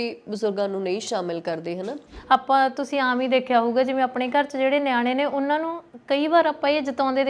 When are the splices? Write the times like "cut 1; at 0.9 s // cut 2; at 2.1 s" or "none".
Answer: cut 1; at 2.1 s